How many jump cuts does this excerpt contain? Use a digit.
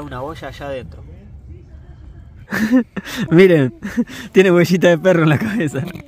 1